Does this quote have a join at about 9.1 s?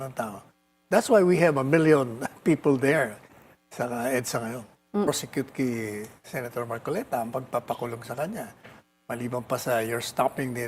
no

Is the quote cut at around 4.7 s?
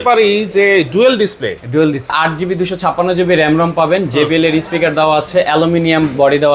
no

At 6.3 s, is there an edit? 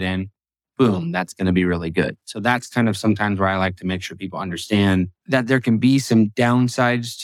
yes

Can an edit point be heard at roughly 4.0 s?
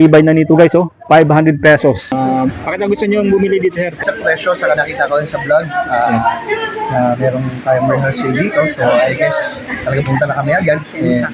yes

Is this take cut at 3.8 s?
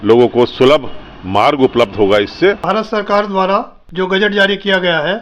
yes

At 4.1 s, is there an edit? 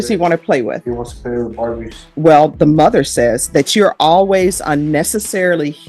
no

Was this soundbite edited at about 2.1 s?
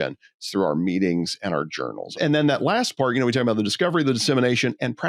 yes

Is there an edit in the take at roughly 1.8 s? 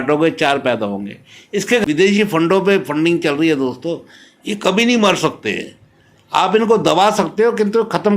yes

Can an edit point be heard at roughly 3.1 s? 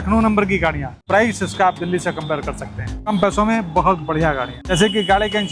yes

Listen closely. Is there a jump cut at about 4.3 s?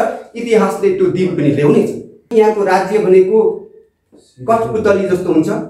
no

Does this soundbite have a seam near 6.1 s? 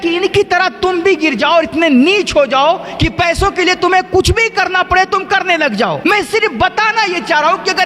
yes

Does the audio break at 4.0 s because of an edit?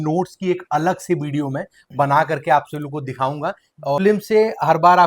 yes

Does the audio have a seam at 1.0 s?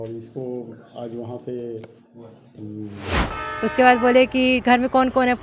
no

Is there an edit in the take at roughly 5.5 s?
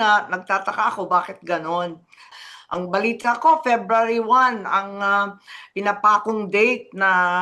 no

